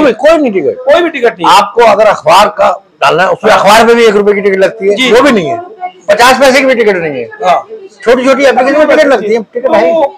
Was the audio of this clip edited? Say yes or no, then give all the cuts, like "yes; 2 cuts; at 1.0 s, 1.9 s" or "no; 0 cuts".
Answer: no; 0 cuts